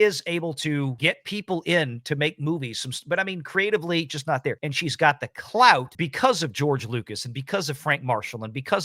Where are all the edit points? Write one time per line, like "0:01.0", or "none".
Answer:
0:00.9
0:04.7
0:06.0

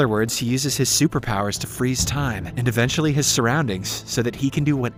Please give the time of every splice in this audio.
none

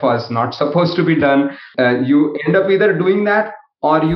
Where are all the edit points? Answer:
0:01.6

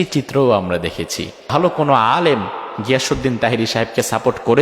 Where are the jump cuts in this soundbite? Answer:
0:01.4

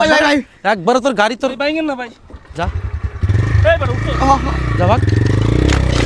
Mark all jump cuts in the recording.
none

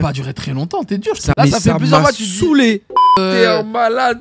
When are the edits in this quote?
0:01.3
0:03.1

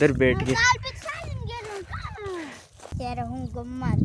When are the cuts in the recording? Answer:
0:02.9

